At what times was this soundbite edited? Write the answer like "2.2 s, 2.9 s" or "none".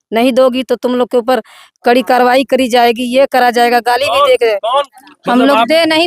4.9 s